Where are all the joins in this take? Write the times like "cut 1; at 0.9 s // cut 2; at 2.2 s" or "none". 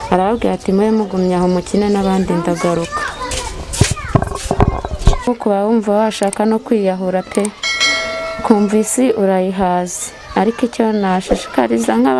cut 1; at 5.3 s